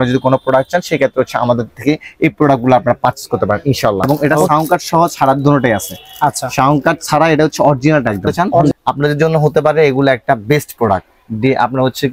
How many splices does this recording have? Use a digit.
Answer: 2